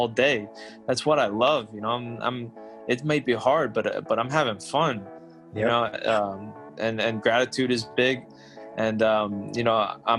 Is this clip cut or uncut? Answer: uncut